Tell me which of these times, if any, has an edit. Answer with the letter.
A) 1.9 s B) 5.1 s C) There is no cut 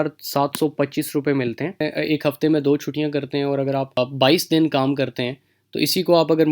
A